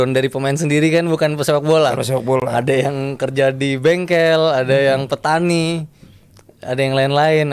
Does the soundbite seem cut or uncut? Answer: uncut